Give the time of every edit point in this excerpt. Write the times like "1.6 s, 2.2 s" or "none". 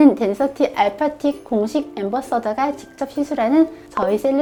none